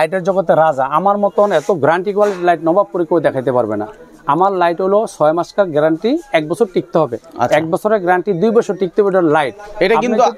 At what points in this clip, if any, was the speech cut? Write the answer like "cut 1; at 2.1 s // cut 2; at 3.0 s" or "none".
none